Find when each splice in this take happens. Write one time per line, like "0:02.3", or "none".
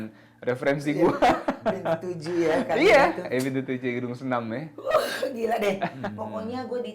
0:06.0